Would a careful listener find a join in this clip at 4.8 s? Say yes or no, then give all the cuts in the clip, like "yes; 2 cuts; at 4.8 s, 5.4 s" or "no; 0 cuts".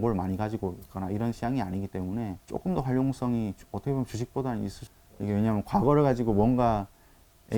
yes; 2 cuts; at 2.4 s, 4.8 s